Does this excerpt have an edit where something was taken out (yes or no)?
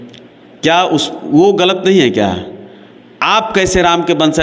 no